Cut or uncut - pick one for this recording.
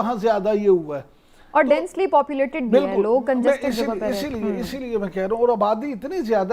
uncut